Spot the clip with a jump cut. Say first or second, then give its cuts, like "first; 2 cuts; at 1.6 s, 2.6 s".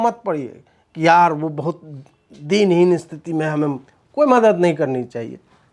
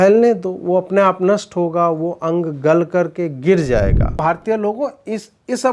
second; 1 cut; at 4.2 s